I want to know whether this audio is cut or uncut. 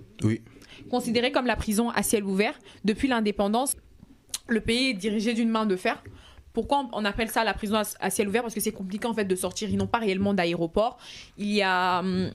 cut